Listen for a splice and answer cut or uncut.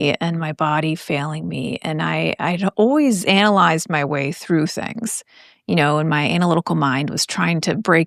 uncut